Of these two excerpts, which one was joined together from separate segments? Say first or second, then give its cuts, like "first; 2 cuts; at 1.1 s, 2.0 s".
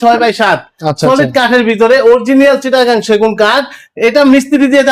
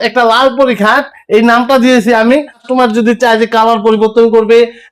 second; 1 cut; at 2.6 s